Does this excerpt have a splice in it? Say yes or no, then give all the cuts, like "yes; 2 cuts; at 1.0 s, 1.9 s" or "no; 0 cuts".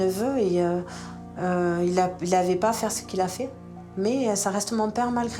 no; 0 cuts